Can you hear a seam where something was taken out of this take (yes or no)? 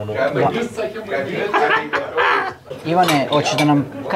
yes